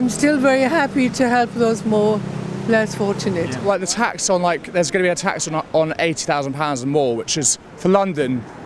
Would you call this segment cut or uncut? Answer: cut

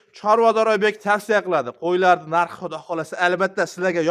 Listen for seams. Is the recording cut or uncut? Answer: uncut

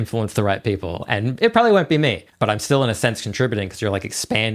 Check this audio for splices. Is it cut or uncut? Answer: cut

